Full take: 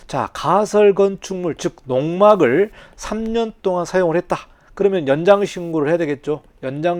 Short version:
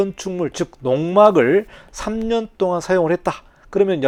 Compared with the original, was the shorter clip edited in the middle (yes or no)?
no